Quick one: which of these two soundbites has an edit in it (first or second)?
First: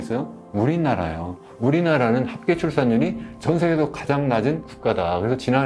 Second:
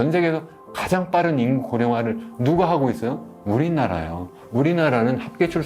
first